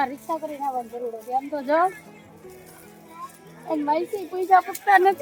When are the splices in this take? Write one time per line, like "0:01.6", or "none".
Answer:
none